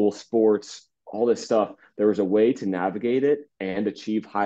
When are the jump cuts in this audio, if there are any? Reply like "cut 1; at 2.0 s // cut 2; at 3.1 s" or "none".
none